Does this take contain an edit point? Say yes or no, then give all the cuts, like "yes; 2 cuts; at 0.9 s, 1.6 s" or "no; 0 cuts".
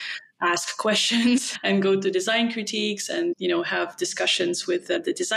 no; 0 cuts